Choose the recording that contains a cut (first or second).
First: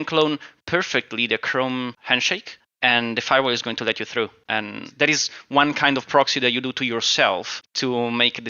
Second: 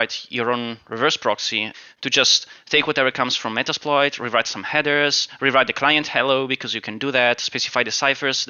first